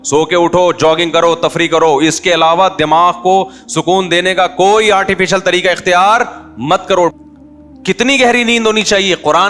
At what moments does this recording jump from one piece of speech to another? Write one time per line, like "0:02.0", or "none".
0:07.1